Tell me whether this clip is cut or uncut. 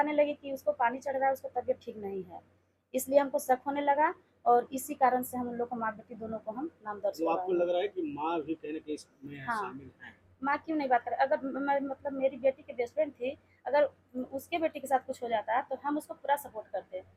uncut